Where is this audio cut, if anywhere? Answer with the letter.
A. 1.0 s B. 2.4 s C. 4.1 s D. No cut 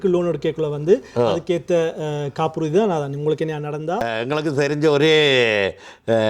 C